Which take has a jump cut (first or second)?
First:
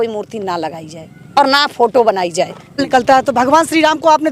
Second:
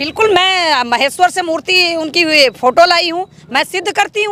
first